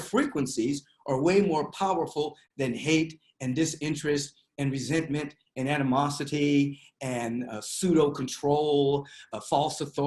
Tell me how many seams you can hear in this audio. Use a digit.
0